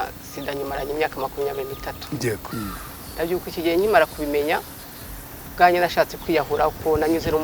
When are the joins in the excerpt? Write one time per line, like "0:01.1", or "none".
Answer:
0:02.5